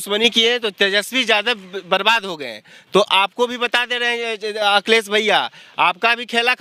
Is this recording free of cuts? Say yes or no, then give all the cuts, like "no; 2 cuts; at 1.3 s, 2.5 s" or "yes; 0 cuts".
yes; 0 cuts